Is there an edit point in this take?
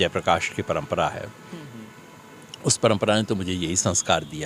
no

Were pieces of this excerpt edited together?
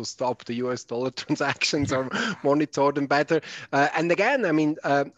no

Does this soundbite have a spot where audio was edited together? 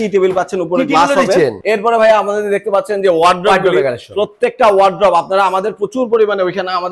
yes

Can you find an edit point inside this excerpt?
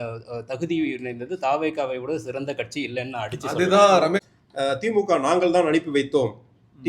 yes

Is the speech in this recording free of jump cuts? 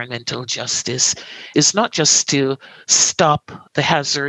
no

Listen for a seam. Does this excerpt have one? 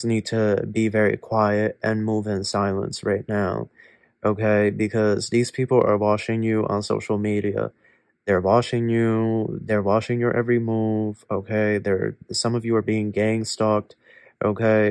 no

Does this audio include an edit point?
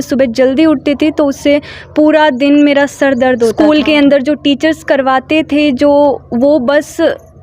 yes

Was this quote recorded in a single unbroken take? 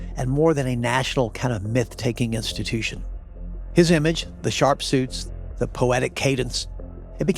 yes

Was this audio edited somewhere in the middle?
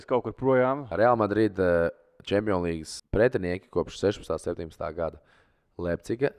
yes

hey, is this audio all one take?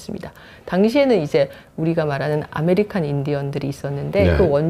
yes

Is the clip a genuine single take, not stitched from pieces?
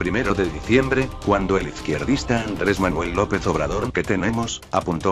yes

